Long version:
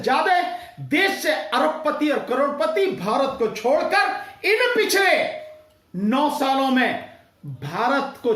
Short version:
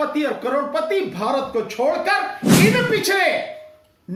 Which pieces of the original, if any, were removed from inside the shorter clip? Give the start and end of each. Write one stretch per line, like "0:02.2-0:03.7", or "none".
none